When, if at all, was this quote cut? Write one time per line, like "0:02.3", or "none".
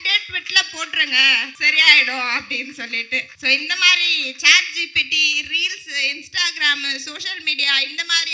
0:01.6
0:03.3